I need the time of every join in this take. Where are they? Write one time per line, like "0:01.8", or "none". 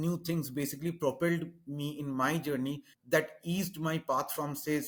none